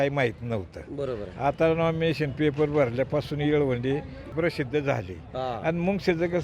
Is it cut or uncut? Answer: cut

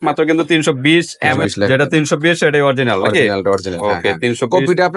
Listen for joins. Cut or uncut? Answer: cut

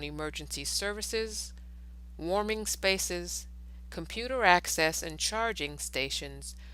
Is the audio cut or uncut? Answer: uncut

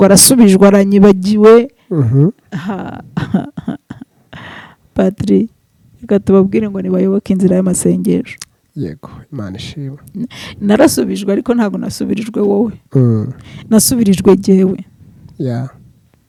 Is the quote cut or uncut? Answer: uncut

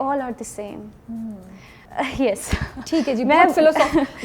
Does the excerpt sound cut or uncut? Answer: uncut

